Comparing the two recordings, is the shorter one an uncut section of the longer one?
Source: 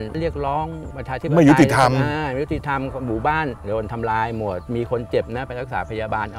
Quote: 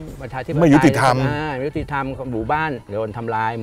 yes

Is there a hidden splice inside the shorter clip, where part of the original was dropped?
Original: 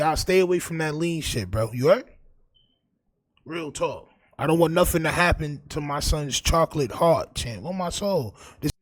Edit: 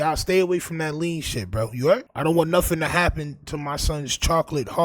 yes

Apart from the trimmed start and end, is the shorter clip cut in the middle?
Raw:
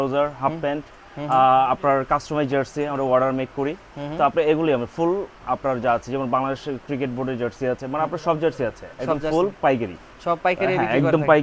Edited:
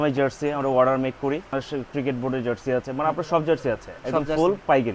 yes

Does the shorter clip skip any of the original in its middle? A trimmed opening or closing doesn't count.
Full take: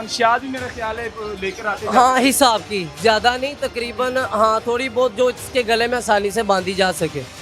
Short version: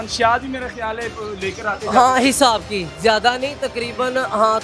no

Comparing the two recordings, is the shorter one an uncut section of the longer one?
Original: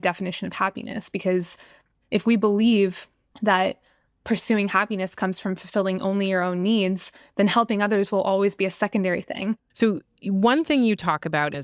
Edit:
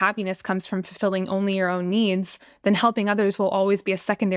yes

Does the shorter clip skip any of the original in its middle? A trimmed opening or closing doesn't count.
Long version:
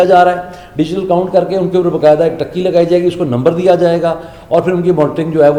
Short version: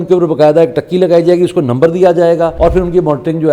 yes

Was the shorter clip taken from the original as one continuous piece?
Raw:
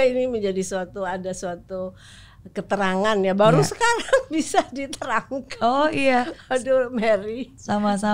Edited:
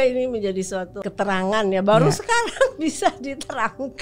no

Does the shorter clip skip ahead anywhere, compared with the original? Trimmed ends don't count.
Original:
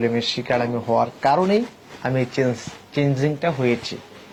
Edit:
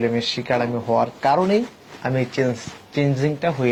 no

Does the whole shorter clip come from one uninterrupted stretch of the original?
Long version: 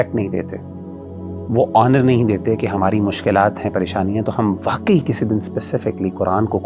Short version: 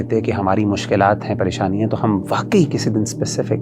yes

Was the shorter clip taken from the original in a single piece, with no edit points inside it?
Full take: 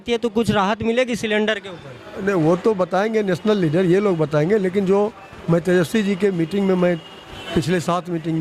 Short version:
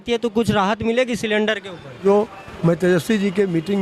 no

